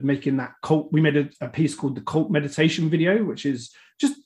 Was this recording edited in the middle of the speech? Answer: no; 0 cuts

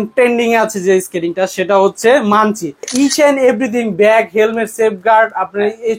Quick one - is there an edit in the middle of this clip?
yes; 1 cut; at 2.9 s

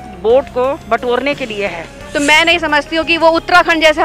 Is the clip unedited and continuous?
no; 1 cut; at 2.0 s

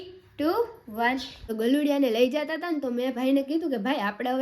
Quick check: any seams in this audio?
yes; 1 cut; at 1.4 s

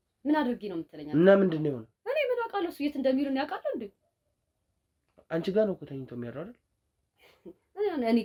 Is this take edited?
no; 0 cuts

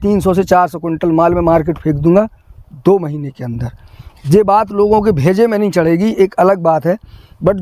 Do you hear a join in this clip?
no; 0 cuts

